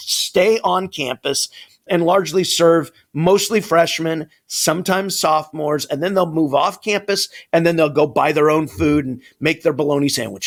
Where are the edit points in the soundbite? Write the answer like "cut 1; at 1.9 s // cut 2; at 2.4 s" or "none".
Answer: none